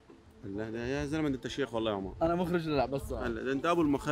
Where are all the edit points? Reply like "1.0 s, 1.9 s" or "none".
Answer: none

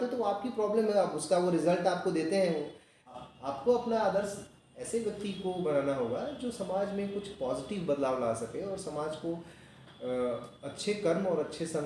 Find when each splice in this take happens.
none

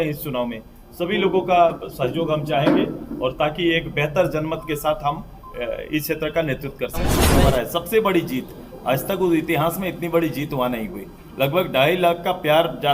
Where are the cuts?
7.3 s

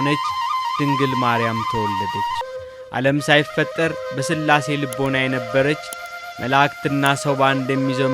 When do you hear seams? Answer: 2.4 s

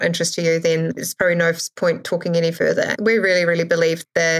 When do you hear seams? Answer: 2.9 s

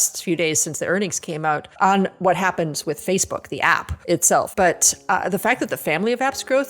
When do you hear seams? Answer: 1.7 s, 4.3 s

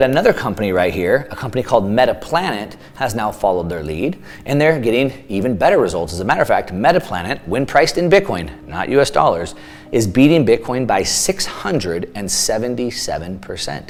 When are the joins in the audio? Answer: none

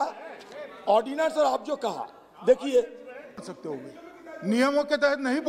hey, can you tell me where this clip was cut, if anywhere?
3.4 s

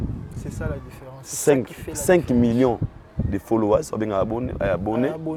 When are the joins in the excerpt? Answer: none

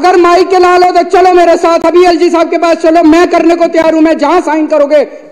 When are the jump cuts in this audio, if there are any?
none

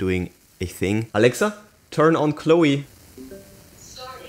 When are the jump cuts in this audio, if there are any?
1.1 s

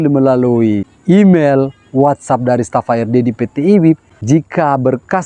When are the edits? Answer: 0.9 s, 4.1 s

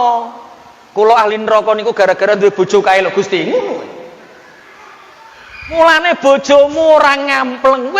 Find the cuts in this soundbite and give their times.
5.8 s

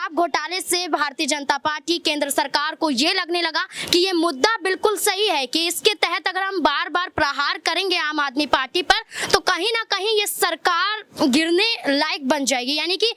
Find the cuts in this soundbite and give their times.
none

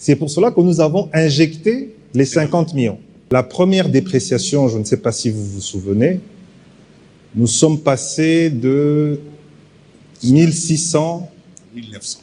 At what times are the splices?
3.2 s

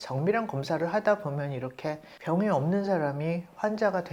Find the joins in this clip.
2.1 s

